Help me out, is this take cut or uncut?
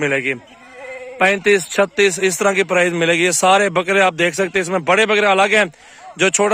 uncut